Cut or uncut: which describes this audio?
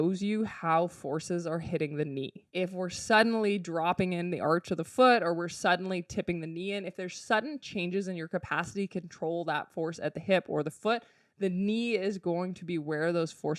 cut